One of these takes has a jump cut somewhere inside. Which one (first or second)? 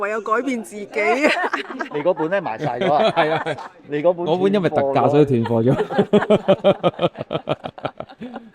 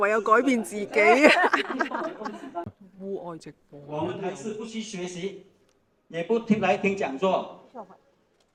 first